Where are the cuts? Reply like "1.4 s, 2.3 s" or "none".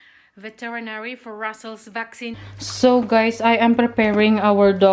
2.5 s